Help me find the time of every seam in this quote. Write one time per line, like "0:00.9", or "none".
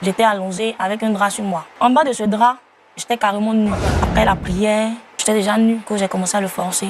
0:01.7
0:03.9
0:05.1
0:05.8